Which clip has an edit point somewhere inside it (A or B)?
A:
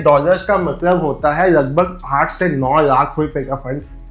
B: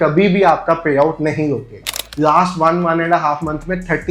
B